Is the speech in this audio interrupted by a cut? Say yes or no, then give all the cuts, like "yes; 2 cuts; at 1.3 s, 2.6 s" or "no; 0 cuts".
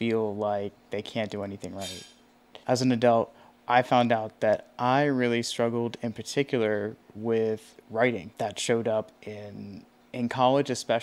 no; 0 cuts